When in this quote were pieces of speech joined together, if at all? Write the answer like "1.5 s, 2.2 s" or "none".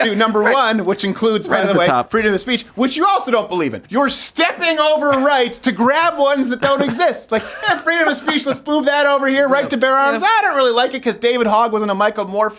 3.8 s